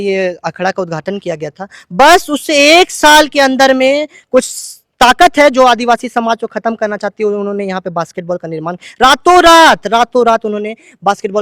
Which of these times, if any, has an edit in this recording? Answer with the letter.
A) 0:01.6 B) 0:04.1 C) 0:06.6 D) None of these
D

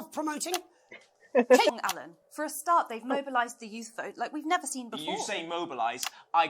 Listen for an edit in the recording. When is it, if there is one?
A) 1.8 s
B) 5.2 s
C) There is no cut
A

